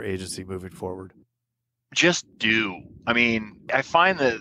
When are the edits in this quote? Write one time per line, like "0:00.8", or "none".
none